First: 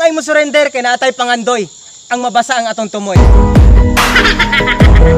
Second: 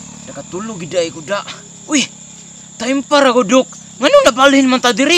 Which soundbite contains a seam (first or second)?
first